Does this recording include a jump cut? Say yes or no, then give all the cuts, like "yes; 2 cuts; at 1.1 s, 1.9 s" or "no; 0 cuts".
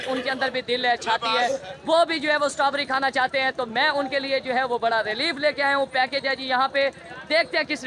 no; 0 cuts